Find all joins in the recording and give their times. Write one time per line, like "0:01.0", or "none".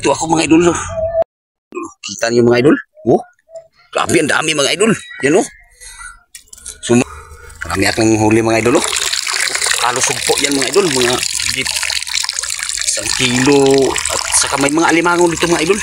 0:01.2
0:07.0

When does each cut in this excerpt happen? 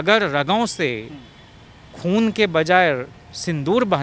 none

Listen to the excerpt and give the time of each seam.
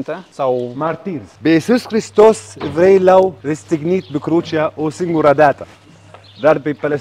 0:01.2
0:03.4

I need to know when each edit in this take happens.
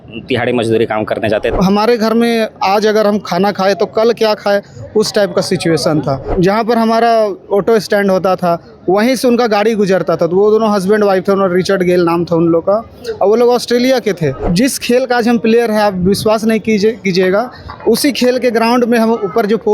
0:01.5
0:06.3
0:14.4

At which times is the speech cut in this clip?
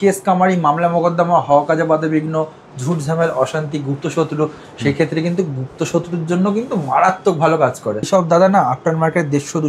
0:08.1

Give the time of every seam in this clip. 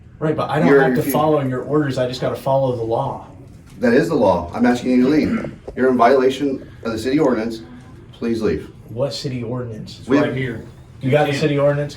none

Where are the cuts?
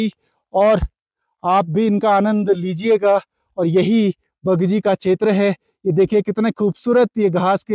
none

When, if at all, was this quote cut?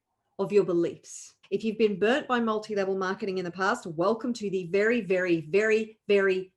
0:01.3

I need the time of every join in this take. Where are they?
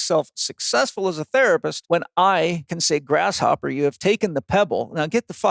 0:01.7
0:02.7

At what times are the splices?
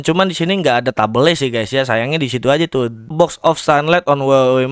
0:03.1

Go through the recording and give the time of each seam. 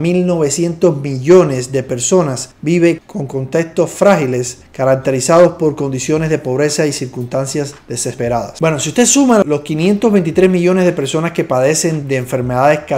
none

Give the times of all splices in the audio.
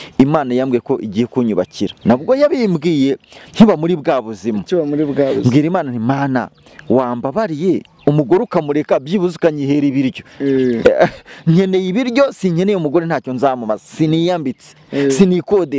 none

